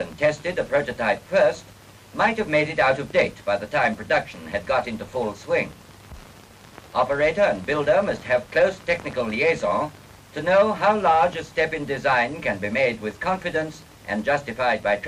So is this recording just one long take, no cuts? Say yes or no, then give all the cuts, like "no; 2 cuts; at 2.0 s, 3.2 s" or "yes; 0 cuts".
yes; 0 cuts